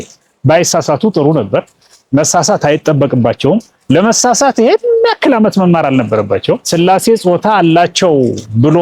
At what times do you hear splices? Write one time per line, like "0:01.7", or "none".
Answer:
0:06.7